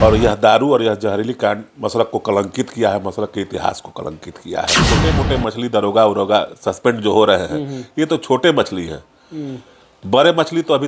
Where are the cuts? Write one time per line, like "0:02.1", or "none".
0:04.8